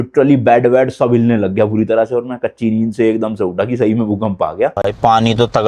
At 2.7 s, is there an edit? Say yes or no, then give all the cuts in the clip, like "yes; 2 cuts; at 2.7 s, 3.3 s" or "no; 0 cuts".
no; 1 cut; at 4.8 s